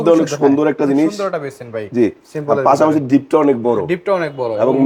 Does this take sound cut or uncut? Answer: uncut